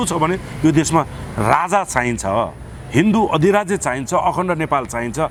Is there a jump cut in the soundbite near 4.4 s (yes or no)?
no